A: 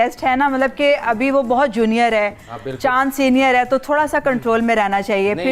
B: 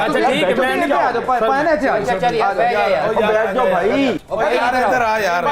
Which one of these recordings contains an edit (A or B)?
B